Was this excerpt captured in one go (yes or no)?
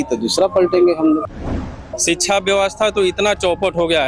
no